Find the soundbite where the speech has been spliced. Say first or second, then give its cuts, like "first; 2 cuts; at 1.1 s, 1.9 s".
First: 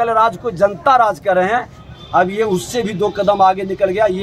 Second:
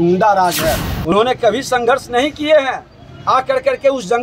second; 1 cut; at 1.1 s